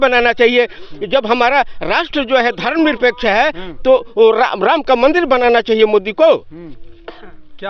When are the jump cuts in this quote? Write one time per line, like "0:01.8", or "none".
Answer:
none